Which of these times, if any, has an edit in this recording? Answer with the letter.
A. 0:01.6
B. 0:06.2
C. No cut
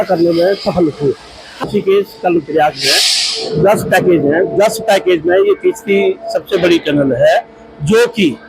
A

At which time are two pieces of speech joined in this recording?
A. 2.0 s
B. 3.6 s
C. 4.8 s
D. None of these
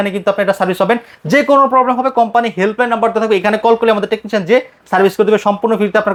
D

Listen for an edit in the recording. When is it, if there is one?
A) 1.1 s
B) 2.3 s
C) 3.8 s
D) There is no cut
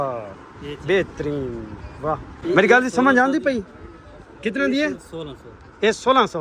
B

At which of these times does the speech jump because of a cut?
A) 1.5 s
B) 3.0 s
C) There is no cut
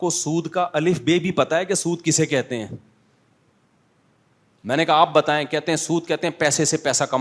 C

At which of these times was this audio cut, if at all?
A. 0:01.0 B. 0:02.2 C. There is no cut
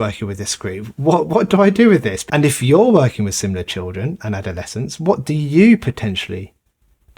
B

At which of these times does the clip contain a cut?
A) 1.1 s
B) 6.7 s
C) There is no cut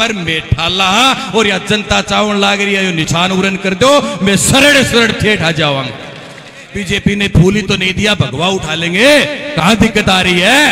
B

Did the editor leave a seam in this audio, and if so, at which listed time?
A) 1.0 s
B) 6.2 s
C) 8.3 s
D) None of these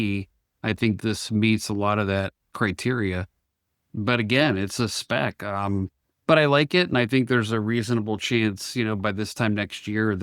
A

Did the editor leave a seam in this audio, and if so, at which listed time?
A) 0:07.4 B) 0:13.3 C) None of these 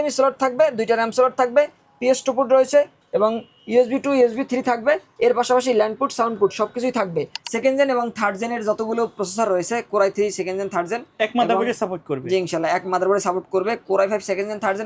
A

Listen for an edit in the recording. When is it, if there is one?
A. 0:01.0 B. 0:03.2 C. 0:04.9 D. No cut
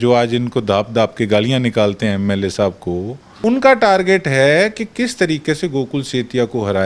B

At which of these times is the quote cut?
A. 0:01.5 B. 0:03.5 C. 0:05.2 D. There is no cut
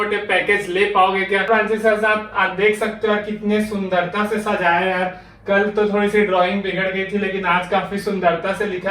A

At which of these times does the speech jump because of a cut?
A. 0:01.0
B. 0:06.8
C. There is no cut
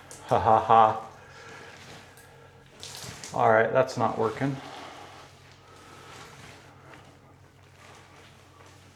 C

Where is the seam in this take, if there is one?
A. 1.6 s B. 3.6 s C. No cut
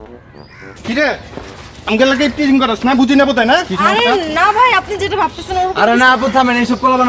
C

